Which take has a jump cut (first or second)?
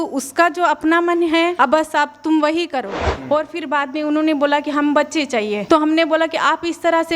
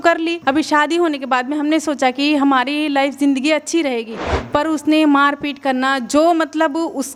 first